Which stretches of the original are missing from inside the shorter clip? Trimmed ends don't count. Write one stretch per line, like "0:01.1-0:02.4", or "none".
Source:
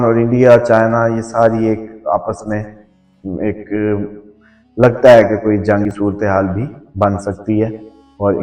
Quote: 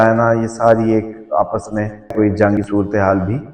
0:02.9-0:05.4